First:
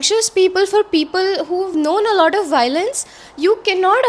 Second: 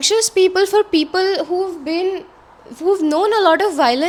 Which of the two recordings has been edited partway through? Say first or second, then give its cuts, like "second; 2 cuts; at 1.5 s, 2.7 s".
first; 1 cut; at 1.7 s